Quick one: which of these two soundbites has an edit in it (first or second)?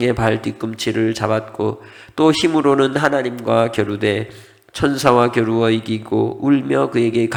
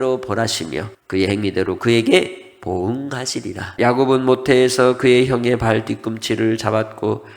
second